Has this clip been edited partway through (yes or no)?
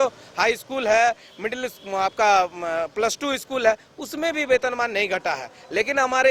no